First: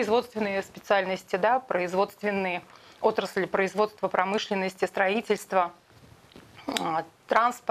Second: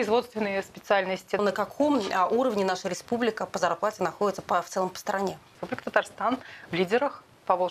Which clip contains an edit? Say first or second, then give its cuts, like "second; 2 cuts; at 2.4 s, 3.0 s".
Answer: second; 2 cuts; at 1.4 s, 5.6 s